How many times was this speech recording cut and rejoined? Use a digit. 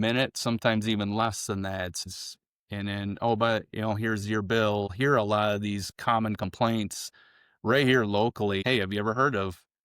3